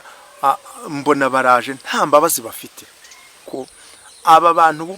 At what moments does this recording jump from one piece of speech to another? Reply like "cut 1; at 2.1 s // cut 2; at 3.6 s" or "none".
cut 1; at 3.4 s

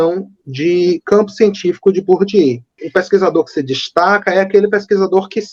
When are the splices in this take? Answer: cut 1; at 2.7 s

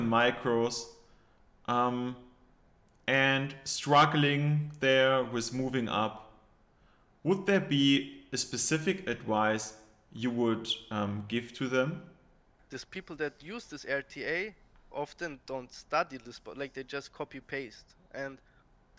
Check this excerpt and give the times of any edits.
cut 1; at 12.6 s

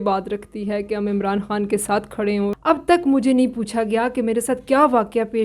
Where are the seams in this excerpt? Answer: cut 1; at 2.6 s

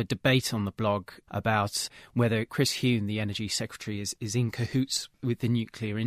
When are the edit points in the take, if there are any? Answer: cut 1; at 2.5 s // cut 2; at 5.1 s

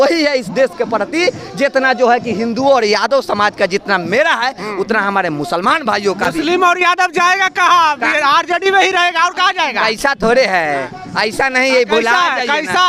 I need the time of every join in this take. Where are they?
none

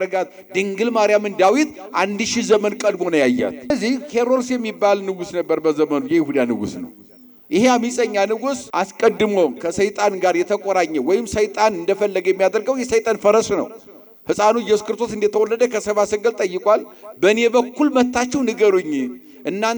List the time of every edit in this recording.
cut 1; at 3.7 s // cut 2; at 8.6 s

